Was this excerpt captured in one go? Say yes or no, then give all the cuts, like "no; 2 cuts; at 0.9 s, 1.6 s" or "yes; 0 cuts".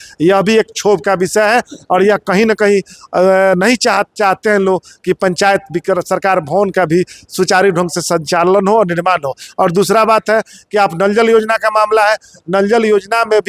yes; 0 cuts